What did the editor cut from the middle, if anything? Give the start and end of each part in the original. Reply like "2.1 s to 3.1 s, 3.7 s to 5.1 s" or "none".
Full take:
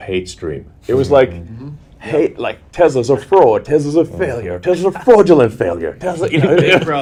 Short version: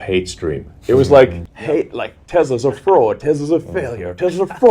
1.5 s to 1.9 s